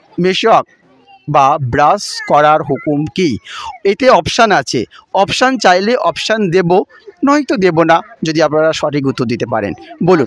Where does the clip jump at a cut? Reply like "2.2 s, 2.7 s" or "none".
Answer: none